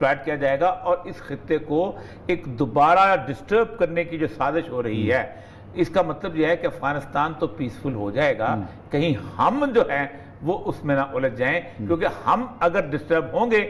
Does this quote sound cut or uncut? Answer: uncut